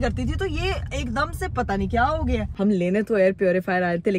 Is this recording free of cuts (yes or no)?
no